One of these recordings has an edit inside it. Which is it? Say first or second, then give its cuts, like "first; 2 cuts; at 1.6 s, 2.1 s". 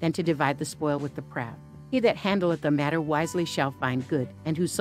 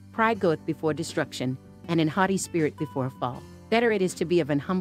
first; 1 cut; at 1.7 s